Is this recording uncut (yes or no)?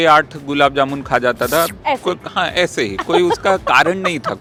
yes